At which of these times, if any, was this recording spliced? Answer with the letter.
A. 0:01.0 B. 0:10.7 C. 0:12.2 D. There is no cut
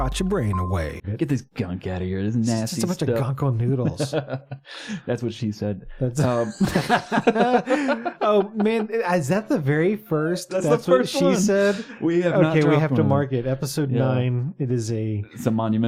A